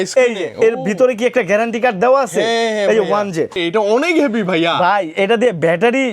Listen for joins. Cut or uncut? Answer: cut